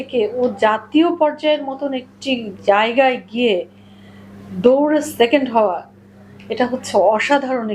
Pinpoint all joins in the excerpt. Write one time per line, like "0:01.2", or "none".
none